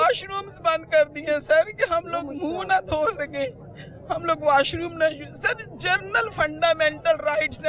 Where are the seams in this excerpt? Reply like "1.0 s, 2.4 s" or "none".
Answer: none